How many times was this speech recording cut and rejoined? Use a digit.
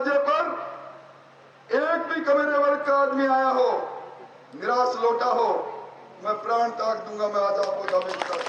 0